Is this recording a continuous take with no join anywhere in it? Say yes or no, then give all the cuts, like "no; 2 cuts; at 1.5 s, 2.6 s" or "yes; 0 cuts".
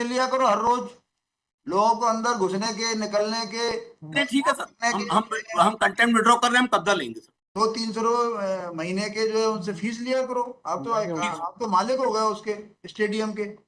yes; 0 cuts